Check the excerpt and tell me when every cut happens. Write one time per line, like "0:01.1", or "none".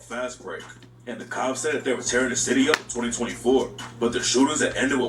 none